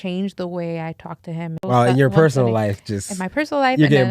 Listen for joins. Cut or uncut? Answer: cut